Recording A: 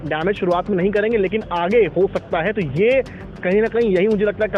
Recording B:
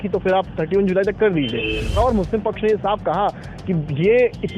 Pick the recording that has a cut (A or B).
B